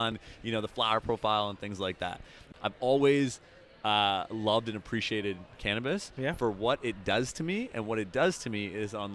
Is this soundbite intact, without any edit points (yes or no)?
no